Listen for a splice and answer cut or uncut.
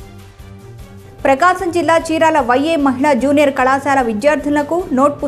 uncut